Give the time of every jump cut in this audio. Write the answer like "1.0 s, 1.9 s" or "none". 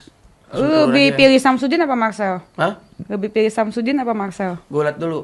none